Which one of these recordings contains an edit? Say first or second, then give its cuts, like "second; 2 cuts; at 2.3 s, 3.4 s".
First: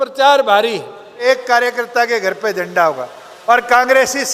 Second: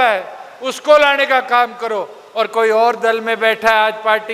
first; 1 cut; at 1.2 s